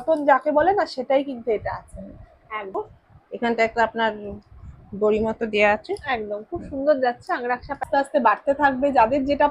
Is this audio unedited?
no; 2 cuts; at 2.8 s, 7.8 s

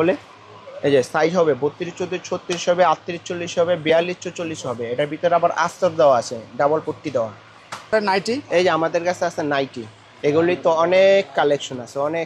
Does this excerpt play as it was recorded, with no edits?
no; 1 cut; at 7.9 s

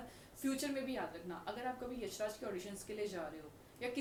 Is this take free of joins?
yes; 0 cuts

